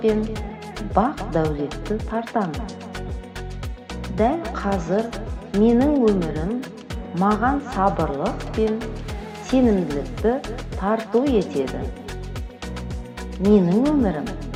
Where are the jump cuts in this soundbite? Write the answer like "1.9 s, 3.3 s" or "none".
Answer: none